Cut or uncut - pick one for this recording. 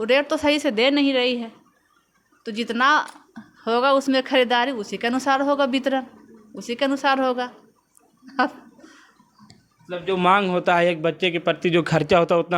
uncut